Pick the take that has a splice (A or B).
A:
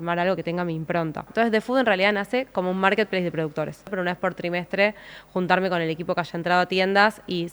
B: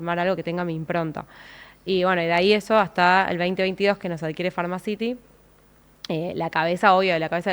A